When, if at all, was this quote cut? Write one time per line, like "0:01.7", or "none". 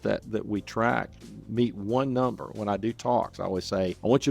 0:02.5